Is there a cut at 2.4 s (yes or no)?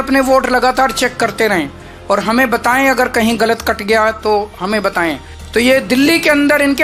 no